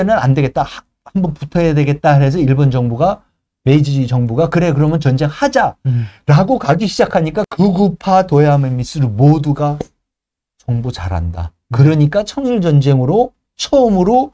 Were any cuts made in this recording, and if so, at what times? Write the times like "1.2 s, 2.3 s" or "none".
7.5 s